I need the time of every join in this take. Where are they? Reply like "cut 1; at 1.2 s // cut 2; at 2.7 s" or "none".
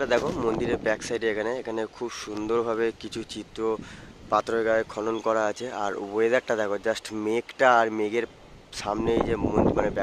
none